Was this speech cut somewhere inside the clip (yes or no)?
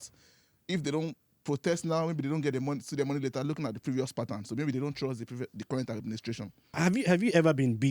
yes